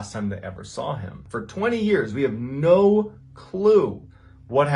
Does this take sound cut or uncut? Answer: cut